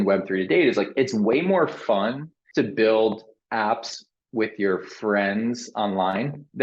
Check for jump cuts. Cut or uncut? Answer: uncut